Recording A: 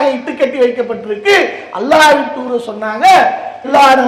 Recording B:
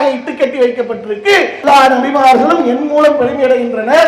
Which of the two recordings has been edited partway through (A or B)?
B